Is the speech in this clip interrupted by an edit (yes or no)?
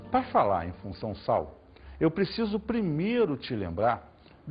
yes